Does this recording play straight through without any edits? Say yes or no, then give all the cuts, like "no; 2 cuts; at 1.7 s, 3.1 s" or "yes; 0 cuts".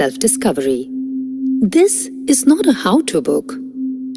no; 1 cut; at 1.8 s